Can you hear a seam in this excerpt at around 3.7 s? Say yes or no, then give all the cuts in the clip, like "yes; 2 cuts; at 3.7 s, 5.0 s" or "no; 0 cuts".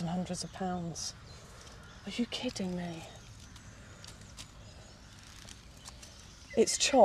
no; 0 cuts